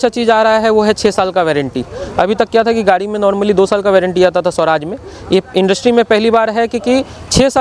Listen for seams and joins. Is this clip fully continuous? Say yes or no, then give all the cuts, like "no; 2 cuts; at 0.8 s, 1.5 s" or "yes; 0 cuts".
yes; 0 cuts